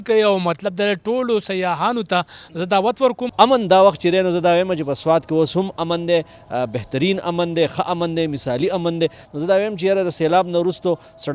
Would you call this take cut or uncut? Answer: cut